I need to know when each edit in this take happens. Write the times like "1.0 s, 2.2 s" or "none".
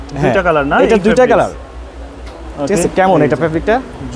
none